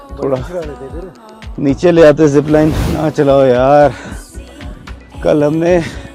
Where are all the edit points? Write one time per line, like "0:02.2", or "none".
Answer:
0:02.9